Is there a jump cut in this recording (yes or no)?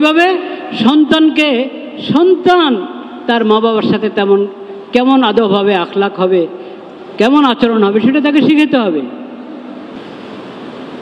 yes